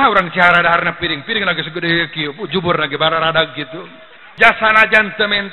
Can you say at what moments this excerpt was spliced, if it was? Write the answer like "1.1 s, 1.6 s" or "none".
4.2 s

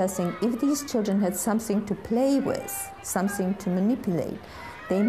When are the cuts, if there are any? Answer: none

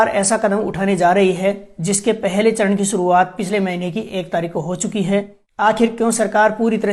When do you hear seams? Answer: 5.4 s

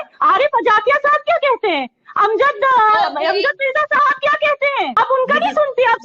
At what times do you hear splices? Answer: 5.0 s

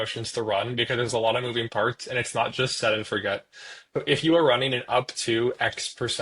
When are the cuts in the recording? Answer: none

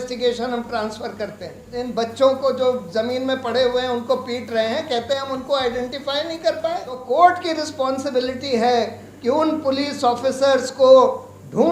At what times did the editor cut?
1.6 s, 7.0 s

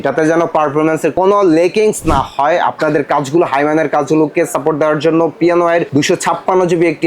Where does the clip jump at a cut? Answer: 1.1 s, 5.9 s

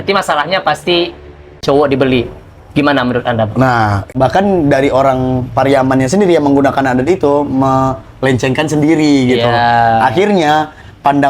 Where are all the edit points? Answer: 1.6 s, 4.1 s

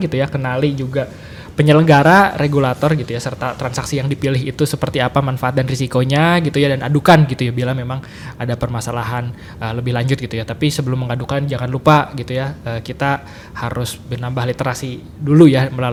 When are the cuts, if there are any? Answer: none

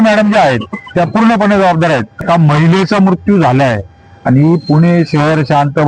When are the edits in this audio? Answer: 2.2 s

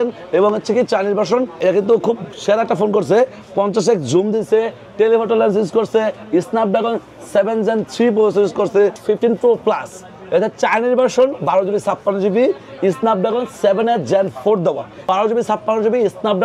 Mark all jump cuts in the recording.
1.6 s, 9.0 s, 14.9 s

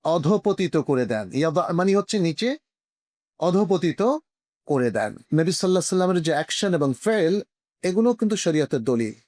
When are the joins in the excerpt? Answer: 5.2 s

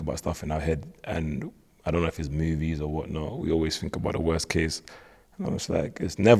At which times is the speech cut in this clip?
none

